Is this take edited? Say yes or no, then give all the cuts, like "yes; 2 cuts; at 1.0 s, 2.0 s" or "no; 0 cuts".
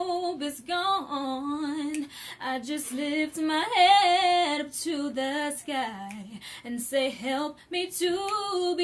no; 0 cuts